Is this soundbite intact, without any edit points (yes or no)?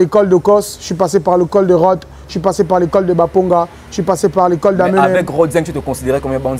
yes